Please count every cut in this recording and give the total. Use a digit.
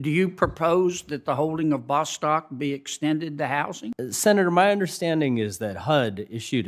1